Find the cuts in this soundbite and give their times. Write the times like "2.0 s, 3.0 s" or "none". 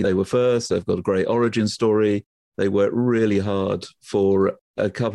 none